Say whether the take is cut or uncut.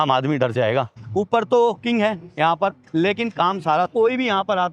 cut